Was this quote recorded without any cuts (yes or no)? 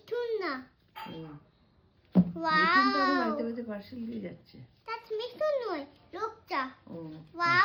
yes